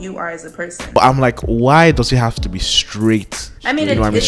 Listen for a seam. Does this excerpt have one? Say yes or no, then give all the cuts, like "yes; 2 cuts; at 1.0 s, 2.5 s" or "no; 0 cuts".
yes; 1 cut; at 1.0 s